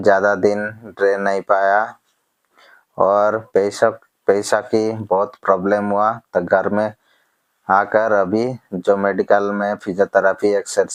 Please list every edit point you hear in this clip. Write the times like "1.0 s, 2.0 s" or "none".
none